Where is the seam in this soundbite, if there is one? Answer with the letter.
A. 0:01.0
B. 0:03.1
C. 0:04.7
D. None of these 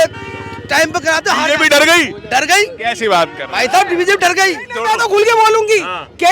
C